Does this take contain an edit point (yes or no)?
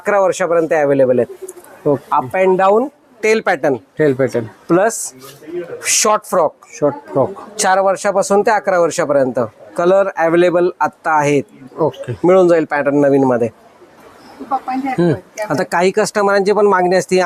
no